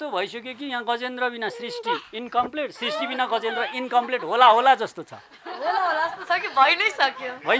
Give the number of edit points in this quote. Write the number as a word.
zero